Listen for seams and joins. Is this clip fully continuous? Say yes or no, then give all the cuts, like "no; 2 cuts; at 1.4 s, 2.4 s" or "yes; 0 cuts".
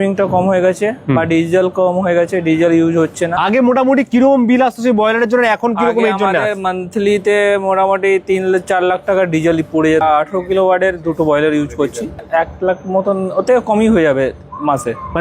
no; 3 cuts; at 3.4 s, 10.0 s, 12.2 s